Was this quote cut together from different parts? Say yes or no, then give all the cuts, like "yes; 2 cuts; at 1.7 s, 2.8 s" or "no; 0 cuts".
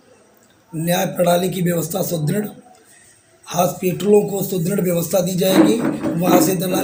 no; 0 cuts